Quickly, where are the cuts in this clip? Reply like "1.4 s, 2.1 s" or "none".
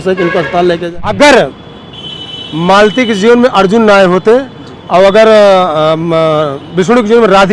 0.9 s